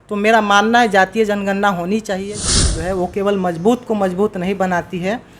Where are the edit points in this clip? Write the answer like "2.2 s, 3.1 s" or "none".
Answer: 2.4 s